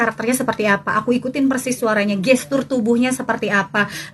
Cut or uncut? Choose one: uncut